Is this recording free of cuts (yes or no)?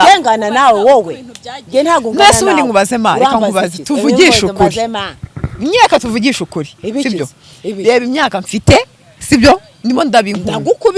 yes